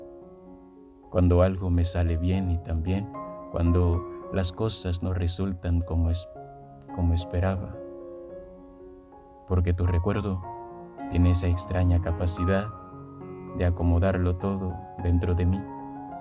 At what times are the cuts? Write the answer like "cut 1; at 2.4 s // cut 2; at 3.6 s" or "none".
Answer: cut 1; at 1.1 s // cut 2; at 8.1 s // cut 3; at 9.4 s

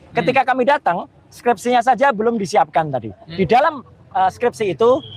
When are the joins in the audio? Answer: cut 1; at 3.2 s

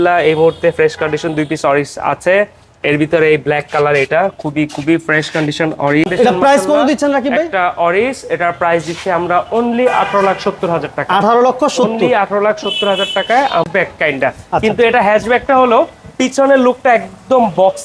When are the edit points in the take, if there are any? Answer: cut 1; at 6.1 s // cut 2; at 13.7 s

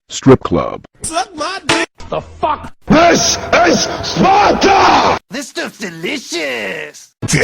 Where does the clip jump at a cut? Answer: cut 1; at 6.3 s

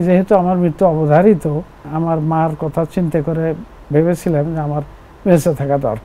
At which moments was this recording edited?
cut 1; at 1.8 s

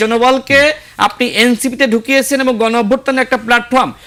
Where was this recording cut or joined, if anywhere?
none

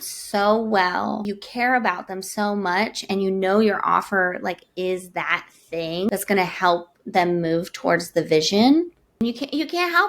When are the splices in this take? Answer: cut 1; at 1.3 s // cut 2; at 6.1 s // cut 3; at 9.2 s

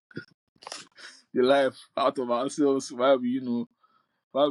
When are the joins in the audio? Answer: none

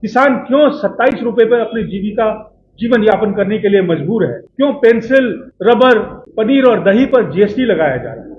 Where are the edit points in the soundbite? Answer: cut 1; at 4.4 s // cut 2; at 5.4 s // cut 3; at 6.2 s

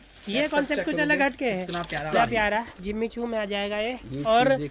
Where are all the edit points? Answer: cut 1; at 2.1 s

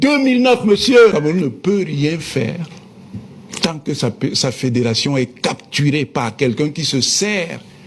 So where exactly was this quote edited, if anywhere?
cut 1; at 1.1 s

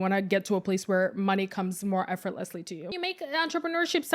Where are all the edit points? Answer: cut 1; at 2.9 s

